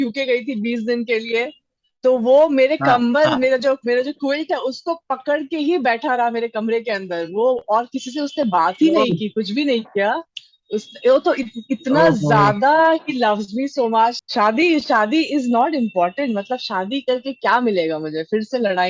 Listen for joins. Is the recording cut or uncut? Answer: cut